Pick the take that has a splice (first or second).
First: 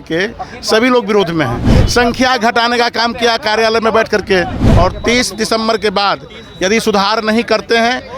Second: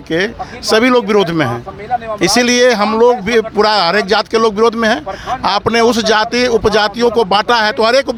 first